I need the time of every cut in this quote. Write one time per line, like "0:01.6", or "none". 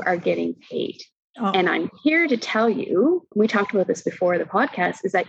none